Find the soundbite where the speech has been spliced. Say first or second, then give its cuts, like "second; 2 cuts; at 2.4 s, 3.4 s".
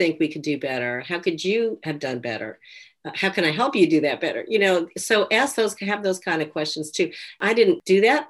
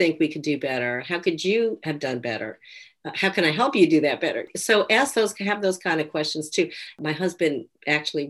second; 2 cuts; at 4.5 s, 6.9 s